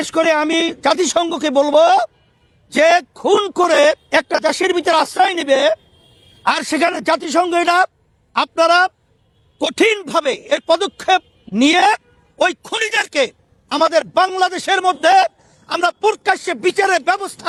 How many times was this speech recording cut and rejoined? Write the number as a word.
zero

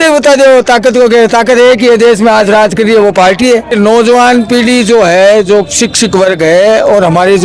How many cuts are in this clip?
zero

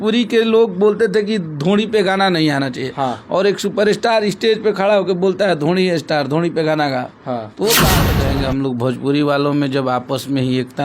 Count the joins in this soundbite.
one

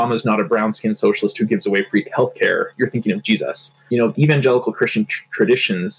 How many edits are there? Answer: one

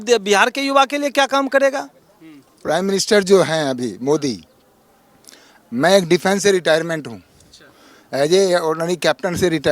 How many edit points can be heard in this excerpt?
one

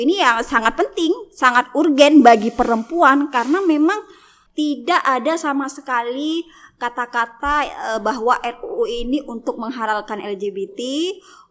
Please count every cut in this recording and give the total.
one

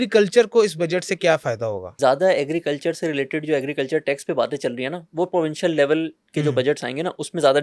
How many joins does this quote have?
one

